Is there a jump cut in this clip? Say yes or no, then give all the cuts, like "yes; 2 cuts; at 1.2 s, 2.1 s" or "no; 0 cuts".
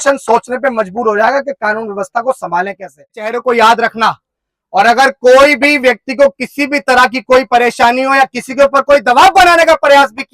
yes; 1 cut; at 3.3 s